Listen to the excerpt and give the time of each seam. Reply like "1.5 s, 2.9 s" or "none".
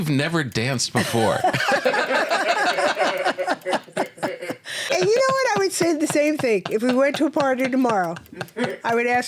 4.9 s